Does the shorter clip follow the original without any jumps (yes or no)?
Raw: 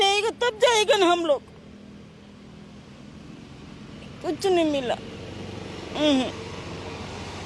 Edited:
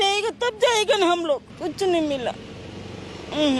no